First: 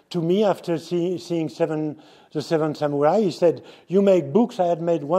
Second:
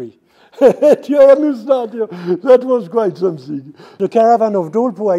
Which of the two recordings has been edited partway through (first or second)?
second